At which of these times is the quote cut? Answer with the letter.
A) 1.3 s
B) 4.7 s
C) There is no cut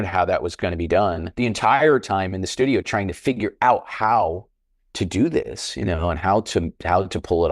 A